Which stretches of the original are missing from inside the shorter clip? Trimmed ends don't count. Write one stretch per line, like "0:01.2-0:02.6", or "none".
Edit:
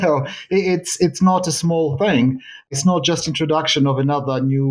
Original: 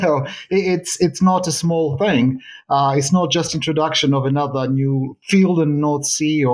0:02.7-0:03.0